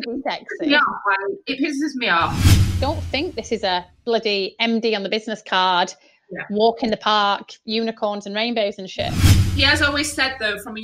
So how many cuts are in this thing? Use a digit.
2